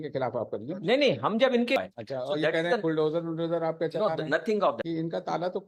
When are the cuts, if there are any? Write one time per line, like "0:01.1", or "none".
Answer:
0:01.8
0:04.8